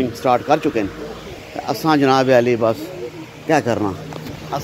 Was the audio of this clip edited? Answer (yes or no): no